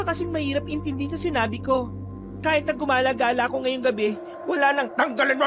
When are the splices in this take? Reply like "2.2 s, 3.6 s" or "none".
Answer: none

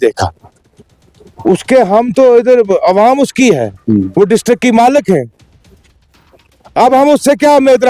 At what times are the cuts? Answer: none

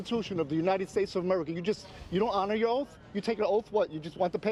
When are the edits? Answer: none

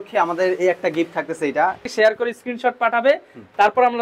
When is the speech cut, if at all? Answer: 1.8 s

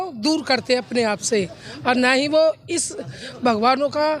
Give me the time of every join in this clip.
none

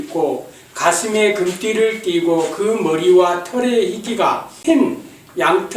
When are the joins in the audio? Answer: 4.5 s

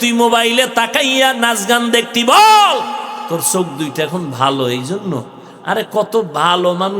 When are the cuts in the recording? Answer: 3.2 s

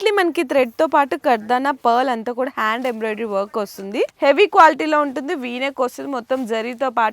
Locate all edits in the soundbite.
4.1 s

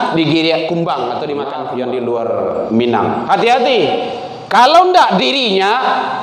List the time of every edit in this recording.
1.6 s

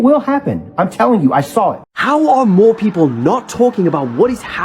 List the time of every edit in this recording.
1.9 s

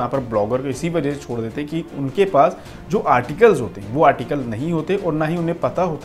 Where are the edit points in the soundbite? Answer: none

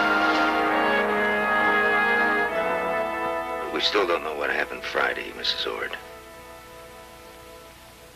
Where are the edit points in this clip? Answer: 3.0 s

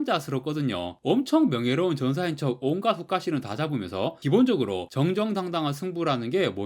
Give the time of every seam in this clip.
none

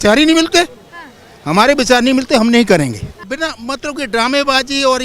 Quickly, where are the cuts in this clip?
3.2 s

